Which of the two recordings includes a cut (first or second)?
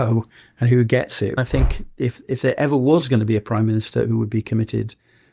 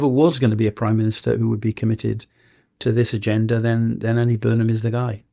first